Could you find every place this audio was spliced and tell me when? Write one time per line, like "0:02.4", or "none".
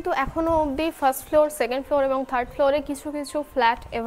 none